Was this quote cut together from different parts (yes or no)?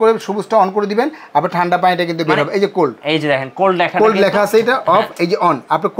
no